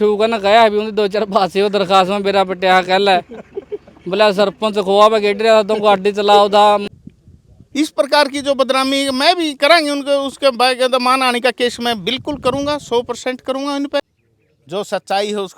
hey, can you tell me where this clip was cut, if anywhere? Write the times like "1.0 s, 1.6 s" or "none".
6.8 s, 14.0 s